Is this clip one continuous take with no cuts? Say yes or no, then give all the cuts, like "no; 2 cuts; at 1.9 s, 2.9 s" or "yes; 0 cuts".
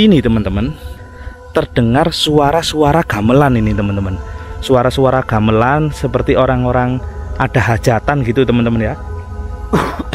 no; 1 cut; at 0.9 s